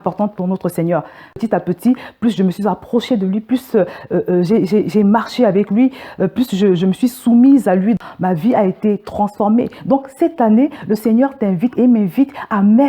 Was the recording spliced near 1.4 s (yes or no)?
yes